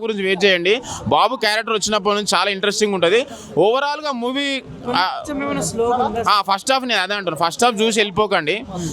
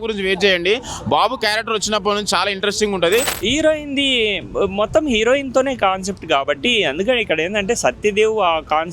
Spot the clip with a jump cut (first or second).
second